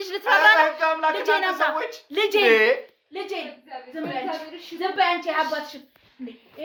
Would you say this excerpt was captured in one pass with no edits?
yes; 0 cuts

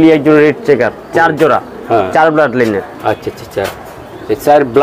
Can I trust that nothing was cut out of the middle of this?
yes; 0 cuts

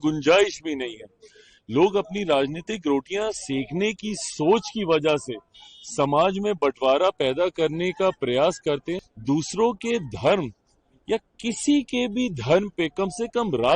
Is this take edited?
yes; 1 cut; at 8.9 s

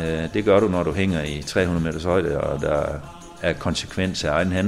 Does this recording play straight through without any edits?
yes; 0 cuts

